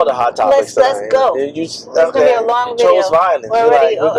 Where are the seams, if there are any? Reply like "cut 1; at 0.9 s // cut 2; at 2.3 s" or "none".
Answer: none